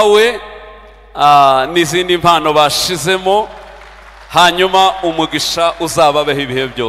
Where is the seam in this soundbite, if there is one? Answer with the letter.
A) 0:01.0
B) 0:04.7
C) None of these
C